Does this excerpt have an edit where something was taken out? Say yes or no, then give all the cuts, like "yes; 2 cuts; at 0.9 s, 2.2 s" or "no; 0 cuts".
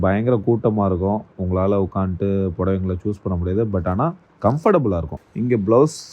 yes; 1 cut; at 5.2 s